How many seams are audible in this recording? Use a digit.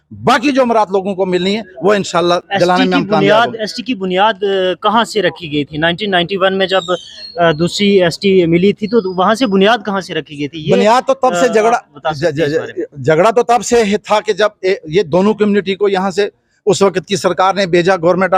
0